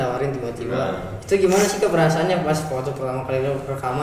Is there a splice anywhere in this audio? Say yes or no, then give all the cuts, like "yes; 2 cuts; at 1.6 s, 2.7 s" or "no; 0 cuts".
no; 0 cuts